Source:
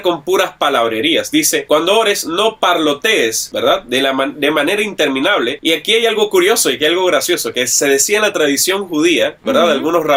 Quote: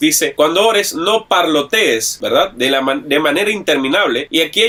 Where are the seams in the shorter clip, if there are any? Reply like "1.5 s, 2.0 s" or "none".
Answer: none